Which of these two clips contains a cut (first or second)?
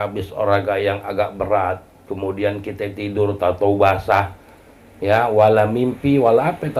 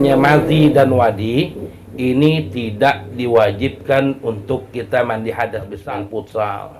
second